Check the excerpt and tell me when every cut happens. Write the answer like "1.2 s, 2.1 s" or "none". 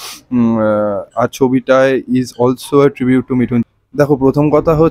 3.6 s